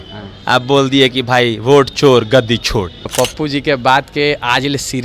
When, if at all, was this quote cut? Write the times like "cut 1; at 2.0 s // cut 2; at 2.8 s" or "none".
cut 1; at 3.1 s